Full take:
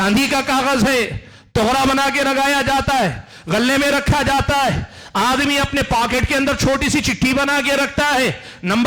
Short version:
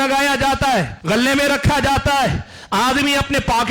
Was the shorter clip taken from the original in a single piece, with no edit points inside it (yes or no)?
no